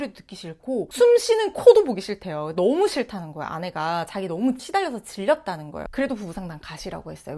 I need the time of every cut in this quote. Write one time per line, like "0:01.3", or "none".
0:04.6
0:05.9